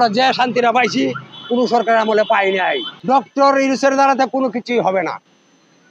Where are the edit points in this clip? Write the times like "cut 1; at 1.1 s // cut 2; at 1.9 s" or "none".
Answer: cut 1; at 2.4 s